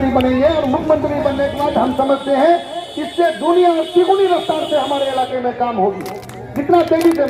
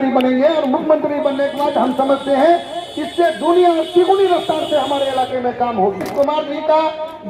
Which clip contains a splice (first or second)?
second